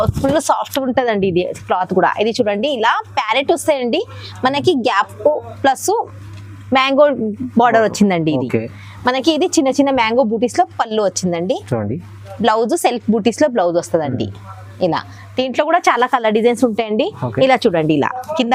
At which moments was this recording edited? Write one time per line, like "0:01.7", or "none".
none